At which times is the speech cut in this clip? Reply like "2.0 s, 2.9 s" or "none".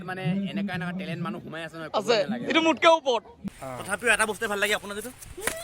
3.4 s